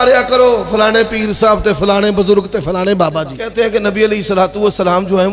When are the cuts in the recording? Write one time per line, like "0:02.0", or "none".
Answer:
0:03.4